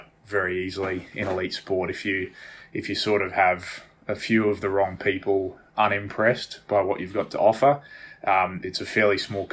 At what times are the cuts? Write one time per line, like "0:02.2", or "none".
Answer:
none